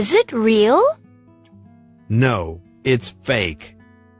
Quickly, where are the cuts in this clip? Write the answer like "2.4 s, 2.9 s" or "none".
1.0 s